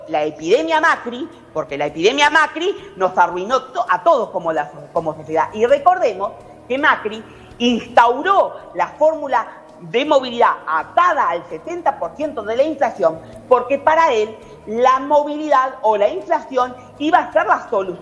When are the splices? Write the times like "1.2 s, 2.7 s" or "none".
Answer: none